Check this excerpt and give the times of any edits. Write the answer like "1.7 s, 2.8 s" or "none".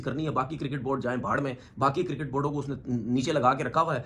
none